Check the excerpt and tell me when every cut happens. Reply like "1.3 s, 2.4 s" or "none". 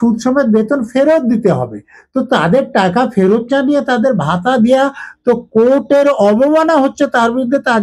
none